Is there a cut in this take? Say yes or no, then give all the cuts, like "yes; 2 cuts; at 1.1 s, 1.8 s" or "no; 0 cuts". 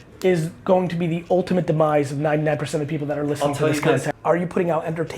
yes; 1 cut; at 4.1 s